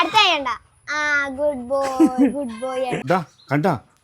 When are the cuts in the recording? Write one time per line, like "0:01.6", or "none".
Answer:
0:03.0